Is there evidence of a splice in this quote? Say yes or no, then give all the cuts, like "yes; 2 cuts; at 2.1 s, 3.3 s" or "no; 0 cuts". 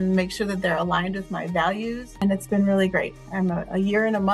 yes; 1 cut; at 2.1 s